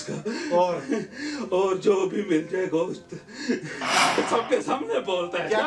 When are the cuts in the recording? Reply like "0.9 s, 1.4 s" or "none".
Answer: 4.2 s